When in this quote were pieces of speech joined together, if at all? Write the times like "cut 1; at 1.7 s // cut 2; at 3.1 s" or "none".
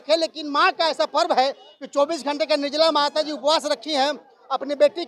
none